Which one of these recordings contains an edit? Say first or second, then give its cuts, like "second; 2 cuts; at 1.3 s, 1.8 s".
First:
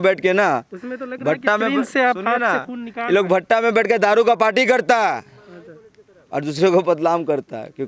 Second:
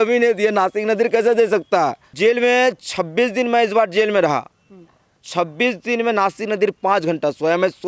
second; 1 cut; at 2.1 s